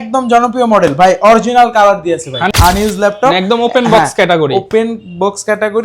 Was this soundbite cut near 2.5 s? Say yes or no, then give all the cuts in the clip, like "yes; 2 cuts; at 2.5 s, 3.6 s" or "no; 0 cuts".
yes; 1 cut; at 2.5 s